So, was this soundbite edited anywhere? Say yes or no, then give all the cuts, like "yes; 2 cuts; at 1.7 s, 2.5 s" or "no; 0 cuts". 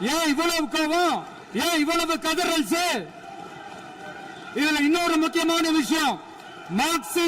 no; 0 cuts